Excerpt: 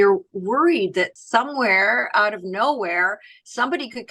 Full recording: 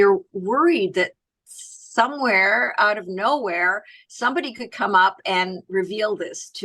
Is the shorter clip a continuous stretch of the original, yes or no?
no